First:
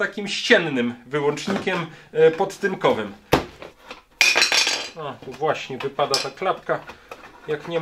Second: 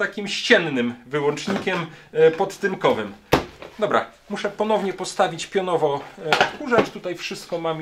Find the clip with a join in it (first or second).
first